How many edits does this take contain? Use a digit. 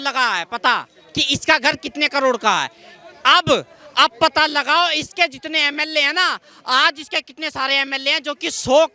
0